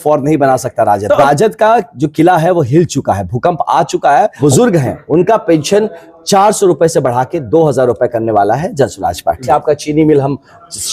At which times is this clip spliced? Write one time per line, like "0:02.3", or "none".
0:01.2
0:04.4
0:09.4